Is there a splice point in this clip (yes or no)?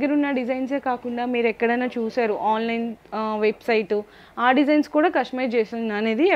no